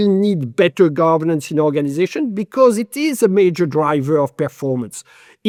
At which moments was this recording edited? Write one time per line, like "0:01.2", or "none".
none